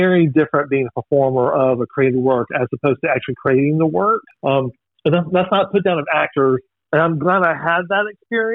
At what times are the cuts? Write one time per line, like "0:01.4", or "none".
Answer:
0:04.3
0:06.7